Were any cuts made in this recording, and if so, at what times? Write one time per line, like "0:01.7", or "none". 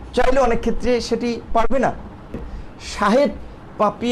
0:02.5